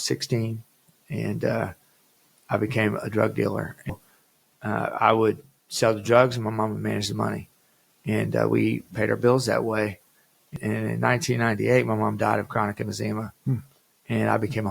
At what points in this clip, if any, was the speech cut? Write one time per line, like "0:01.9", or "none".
0:03.9
0:10.5